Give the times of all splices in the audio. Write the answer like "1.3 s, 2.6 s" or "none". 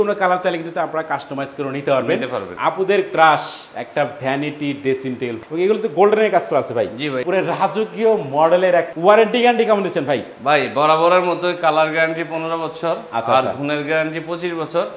2.5 s, 5.4 s, 7.2 s, 8.9 s